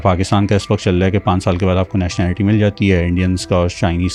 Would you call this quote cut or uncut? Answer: uncut